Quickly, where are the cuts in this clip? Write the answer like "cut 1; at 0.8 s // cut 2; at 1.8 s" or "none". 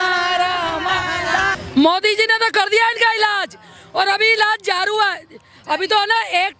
cut 1; at 1.6 s